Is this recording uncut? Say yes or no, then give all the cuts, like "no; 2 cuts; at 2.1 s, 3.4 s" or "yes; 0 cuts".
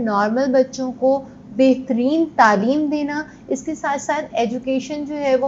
yes; 0 cuts